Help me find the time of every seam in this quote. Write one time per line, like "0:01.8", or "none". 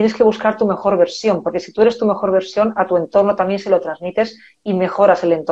none